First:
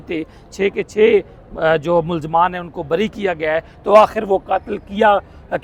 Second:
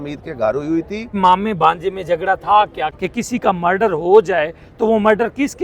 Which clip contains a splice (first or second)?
second